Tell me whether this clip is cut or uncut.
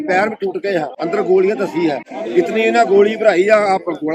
cut